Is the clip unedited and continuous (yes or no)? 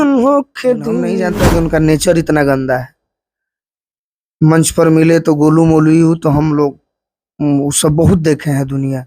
no